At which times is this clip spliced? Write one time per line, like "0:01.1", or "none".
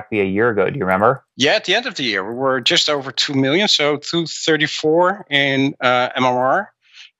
0:01.3

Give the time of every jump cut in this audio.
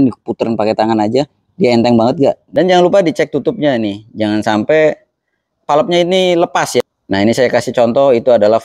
0:02.4
0:06.8

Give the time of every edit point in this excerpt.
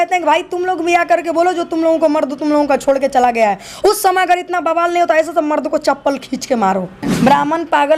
0:07.0

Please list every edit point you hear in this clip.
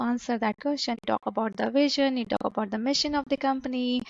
0:01.0

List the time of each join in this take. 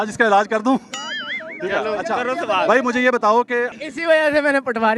0:03.8

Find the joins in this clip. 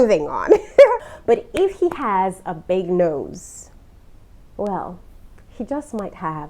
0:01.1

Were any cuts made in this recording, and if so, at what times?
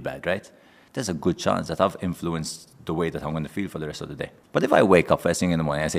0:04.4

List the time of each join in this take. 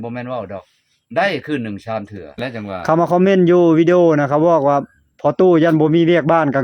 0:02.4

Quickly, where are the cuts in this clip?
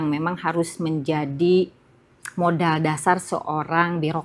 none

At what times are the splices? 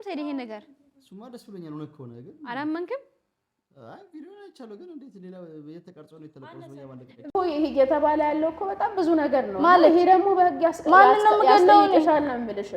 0:07.3

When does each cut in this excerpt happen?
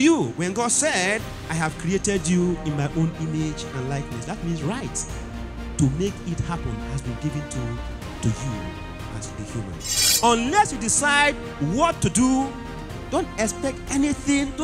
0:10.2

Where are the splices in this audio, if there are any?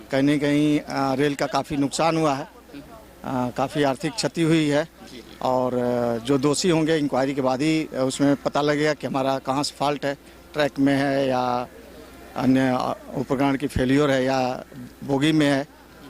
none

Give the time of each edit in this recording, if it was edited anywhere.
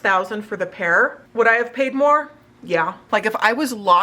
0:03.0

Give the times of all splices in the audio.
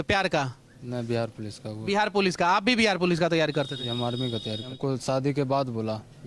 0:04.7

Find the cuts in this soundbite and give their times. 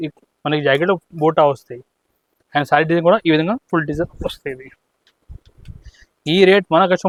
none

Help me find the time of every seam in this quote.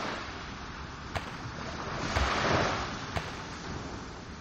none

